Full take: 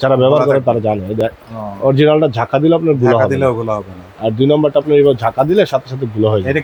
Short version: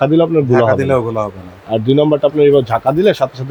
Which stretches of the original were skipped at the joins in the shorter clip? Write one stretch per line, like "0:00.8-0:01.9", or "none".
none